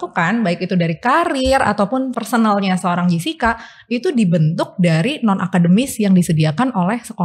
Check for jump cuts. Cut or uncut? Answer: cut